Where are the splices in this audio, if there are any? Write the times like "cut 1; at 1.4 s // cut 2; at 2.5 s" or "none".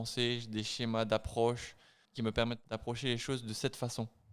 cut 1; at 2.3 s